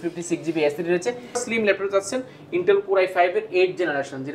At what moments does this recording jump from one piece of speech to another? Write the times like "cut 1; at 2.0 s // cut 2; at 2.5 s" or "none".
cut 1; at 1.4 s